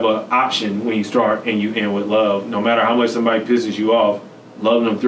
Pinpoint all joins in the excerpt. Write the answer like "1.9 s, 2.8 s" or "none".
none